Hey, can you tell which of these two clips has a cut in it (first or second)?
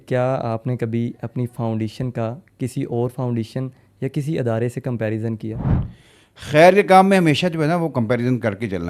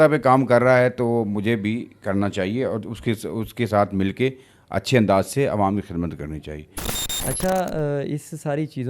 second